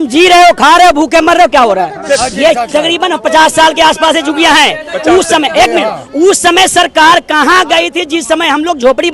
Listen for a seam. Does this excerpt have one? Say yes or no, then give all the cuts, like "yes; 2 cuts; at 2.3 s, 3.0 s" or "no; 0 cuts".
yes; 1 cut; at 2.2 s